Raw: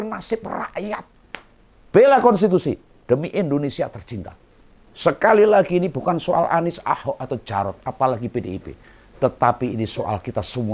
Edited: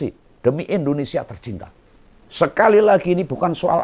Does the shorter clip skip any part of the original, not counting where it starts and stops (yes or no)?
no